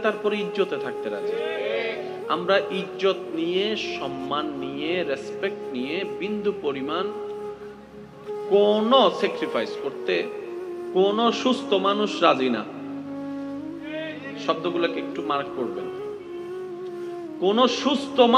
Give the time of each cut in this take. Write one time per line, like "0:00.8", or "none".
0:16.2
0:17.4

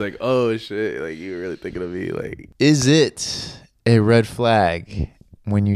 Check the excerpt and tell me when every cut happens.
0:02.4

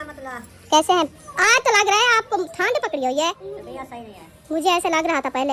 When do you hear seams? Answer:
0:01.2
0:02.5
0:03.5

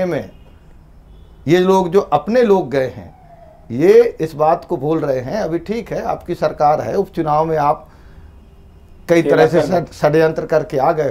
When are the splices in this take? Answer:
none

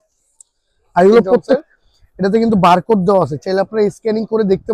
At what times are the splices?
0:01.6

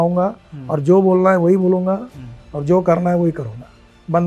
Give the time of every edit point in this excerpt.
none

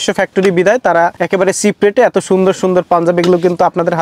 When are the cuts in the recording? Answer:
0:01.2

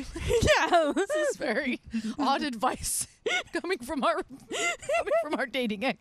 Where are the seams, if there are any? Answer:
0:04.4

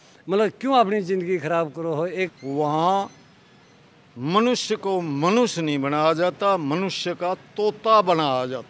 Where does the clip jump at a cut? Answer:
0:02.4

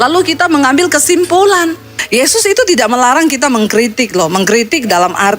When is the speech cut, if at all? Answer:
0:02.0

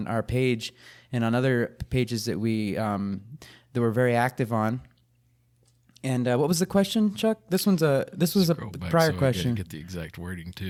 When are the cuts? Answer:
none

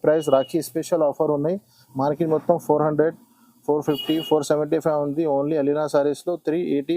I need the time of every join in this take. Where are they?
none

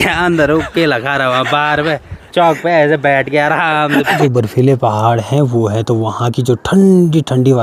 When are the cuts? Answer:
0:04.2

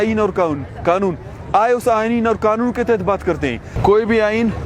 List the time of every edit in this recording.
0:03.7

